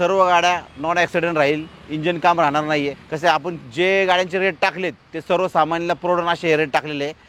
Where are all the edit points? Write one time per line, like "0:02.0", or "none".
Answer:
0:03.0